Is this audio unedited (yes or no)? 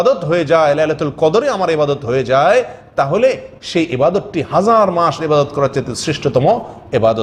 yes